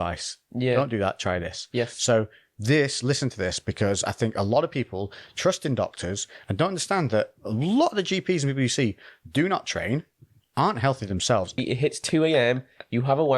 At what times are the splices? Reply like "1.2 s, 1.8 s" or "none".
11.6 s